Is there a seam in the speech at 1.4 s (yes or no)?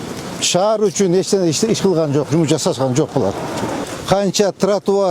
no